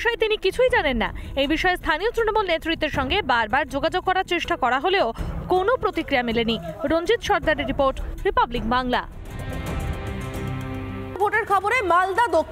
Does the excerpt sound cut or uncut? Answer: cut